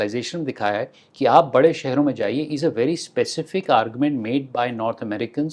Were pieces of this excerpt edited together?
no; 0 cuts

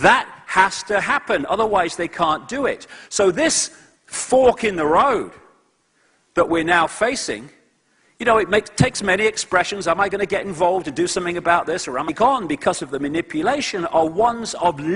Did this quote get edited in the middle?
no; 0 cuts

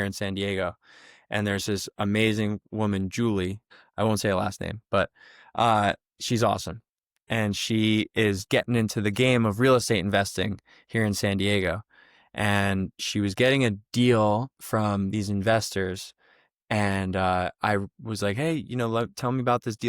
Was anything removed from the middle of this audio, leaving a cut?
yes; 1 cut; at 3.7 s

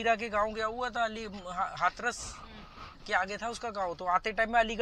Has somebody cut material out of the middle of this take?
no; 0 cuts

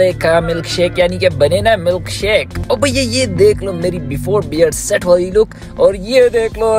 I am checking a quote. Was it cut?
yes; 1 cut; at 2.5 s

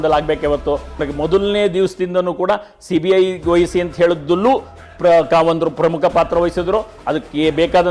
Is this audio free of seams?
no; 1 cut; at 1.0 s

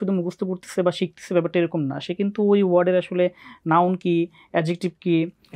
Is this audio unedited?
yes; 0 cuts

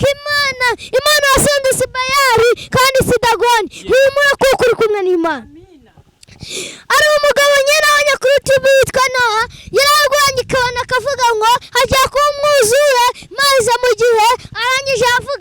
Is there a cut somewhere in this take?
no; 0 cuts

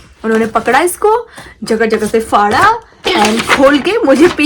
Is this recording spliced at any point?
no; 0 cuts

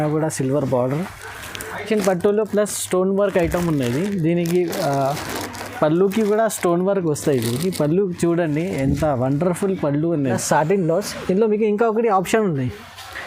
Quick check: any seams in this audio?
yes; 2 cuts; at 1.9 s, 10.4 s

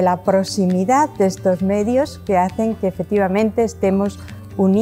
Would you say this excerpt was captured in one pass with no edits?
no; 1 cut; at 3.0 s

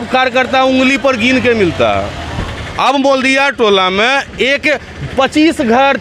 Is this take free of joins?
yes; 0 cuts

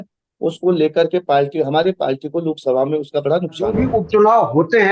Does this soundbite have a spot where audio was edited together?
yes; 1 cut; at 3.7 s

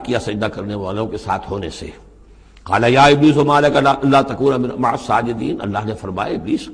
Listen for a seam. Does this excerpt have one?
no; 0 cuts

